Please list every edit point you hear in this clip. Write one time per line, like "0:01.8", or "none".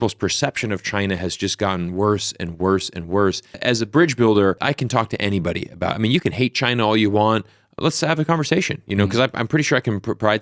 0:03.5
0:04.6